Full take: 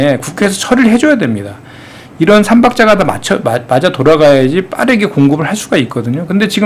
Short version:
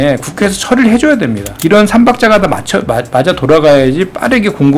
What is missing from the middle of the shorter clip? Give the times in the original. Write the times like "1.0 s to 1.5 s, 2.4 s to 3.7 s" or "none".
1.5 s to 2.0 s